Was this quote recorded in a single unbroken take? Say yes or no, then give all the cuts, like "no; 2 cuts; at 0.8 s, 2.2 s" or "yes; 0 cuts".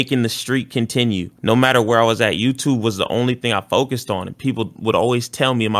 yes; 0 cuts